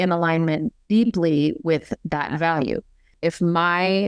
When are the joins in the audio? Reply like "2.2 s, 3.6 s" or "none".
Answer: 3.1 s